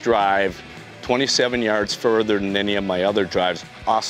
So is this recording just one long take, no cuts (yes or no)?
yes